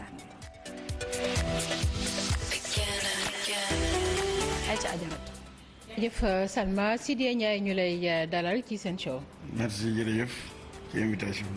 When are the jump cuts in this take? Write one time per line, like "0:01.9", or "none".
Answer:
0:08.3